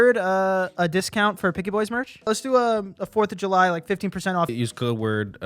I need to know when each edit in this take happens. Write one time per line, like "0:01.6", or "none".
0:02.3
0:04.5